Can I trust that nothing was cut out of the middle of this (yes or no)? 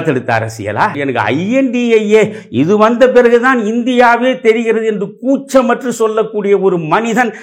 no